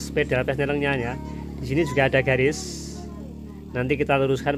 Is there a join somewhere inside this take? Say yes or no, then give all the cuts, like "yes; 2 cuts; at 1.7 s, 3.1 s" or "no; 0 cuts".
no; 0 cuts